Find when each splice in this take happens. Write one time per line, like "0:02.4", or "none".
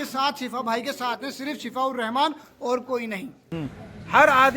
0:03.4